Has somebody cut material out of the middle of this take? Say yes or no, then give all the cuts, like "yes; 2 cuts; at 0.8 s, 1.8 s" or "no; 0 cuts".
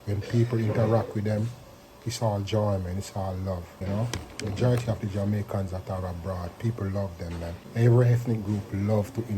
yes; 2 cuts; at 3.7 s, 7.6 s